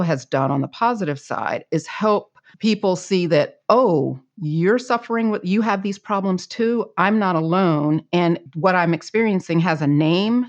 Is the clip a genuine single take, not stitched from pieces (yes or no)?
no